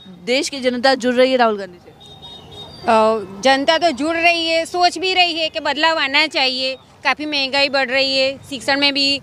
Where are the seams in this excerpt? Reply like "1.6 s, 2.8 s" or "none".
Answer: none